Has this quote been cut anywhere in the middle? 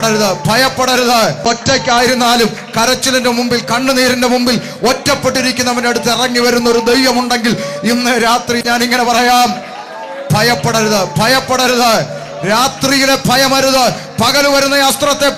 yes; 2 cuts; at 1.5 s, 8.6 s

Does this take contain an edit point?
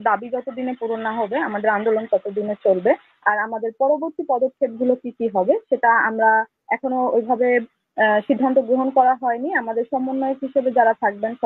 no; 0 cuts

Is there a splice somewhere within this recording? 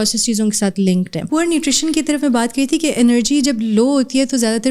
yes; 1 cut; at 1.3 s

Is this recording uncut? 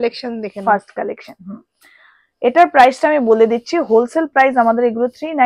yes; 0 cuts

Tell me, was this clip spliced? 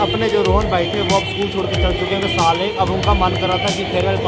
no; 0 cuts

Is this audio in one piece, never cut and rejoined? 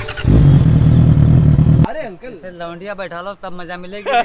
no; 1 cut; at 1.9 s

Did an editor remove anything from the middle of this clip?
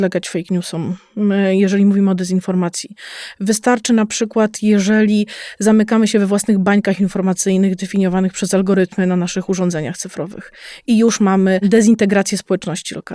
yes; 1 cut; at 11.6 s

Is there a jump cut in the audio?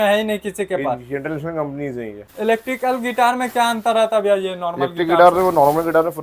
yes; 1 cut; at 2.3 s

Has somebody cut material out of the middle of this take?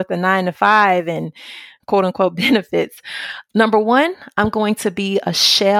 yes; 1 cut; at 1.7 s

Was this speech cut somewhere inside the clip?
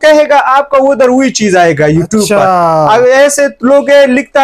no; 0 cuts

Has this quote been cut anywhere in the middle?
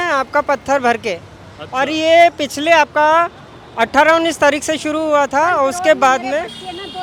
no; 0 cuts

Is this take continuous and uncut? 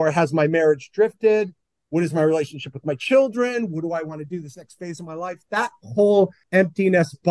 no; 1 cut; at 6.4 s

